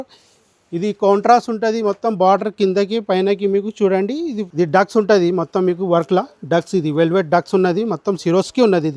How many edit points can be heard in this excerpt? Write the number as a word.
one